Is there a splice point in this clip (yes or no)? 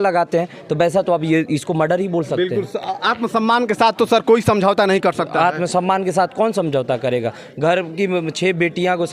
no